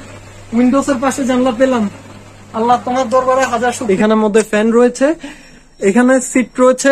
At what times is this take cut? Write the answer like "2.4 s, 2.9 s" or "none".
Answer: 3.8 s